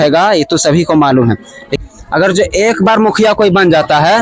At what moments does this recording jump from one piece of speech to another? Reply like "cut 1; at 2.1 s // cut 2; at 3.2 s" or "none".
cut 1; at 1.7 s